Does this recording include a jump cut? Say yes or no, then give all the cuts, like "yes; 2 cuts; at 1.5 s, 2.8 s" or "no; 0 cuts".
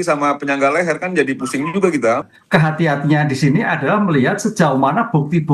yes; 1 cut; at 2.3 s